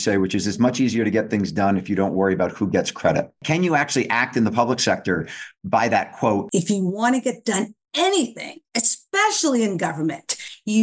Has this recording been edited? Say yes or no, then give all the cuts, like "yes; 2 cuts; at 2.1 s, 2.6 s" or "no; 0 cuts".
yes; 2 cuts; at 3.4 s, 6.4 s